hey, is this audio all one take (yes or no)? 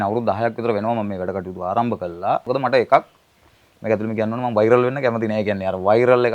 no